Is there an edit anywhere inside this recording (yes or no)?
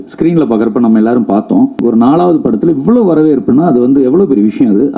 yes